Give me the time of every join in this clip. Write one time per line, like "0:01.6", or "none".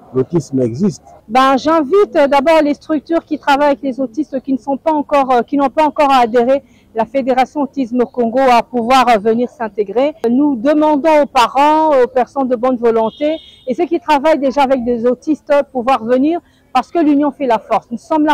0:01.1
0:10.2